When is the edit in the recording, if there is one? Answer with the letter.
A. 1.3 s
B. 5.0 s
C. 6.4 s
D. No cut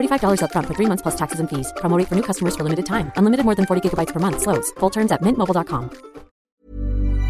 C